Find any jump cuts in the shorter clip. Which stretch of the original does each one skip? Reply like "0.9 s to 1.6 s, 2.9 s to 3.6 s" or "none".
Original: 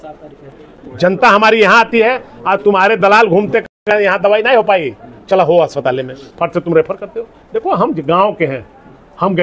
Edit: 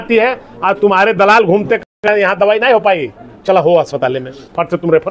none